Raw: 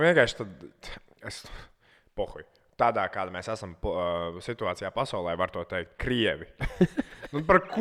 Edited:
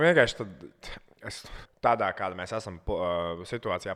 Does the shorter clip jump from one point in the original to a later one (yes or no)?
yes